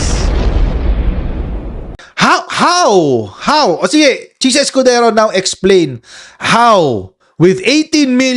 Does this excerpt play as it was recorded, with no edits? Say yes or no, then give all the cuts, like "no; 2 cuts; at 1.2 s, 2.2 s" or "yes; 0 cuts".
no; 1 cut; at 2.0 s